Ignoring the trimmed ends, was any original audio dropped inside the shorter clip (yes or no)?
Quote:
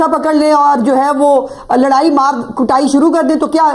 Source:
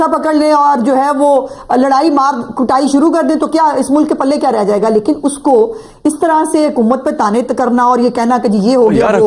no